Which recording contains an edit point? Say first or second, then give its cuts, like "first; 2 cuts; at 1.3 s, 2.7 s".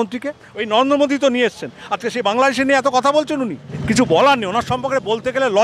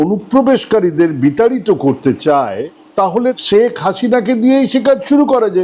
first; 1 cut; at 3.7 s